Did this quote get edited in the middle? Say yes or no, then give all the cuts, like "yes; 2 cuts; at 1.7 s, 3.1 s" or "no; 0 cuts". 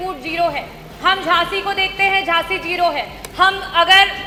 no; 0 cuts